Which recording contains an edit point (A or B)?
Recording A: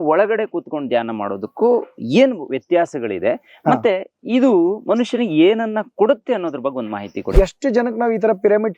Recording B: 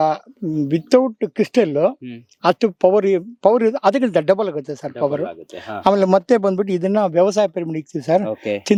A